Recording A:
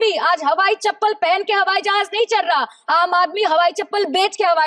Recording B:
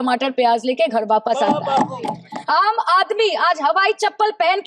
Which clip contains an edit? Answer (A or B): B